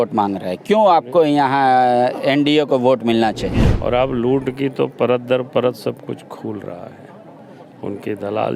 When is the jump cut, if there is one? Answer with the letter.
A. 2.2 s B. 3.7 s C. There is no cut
B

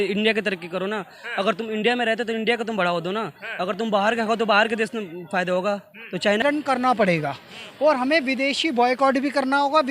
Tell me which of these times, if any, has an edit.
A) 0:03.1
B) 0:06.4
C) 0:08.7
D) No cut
B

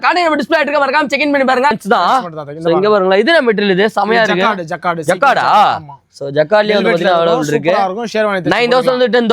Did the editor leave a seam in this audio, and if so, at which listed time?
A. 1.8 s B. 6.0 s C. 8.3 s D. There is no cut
A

